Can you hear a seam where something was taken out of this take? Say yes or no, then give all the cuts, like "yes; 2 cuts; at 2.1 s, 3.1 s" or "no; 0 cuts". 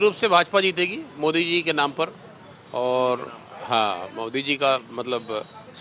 no; 0 cuts